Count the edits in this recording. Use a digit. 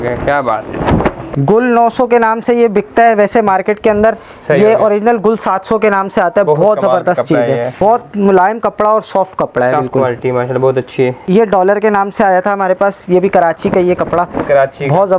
3